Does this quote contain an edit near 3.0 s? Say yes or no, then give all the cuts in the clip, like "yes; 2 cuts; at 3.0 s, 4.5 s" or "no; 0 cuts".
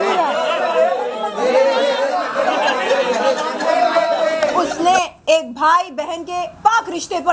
no; 1 cut; at 4.5 s